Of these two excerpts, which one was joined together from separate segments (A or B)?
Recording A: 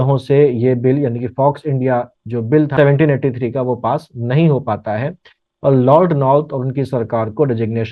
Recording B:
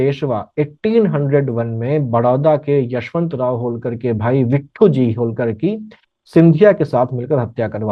A